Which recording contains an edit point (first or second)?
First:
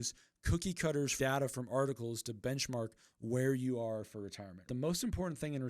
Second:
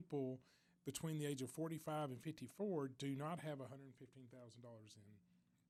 first